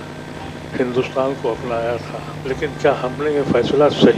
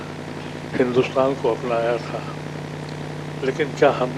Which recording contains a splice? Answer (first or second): first